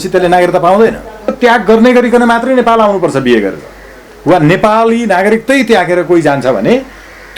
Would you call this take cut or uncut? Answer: cut